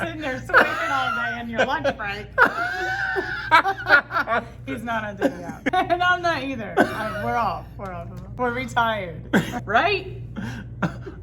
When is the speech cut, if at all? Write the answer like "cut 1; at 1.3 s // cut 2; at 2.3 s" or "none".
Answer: cut 1; at 8.4 s // cut 2; at 9.5 s